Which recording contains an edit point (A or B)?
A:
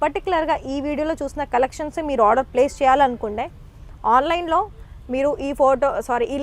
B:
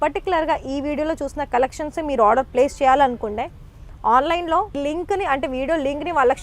B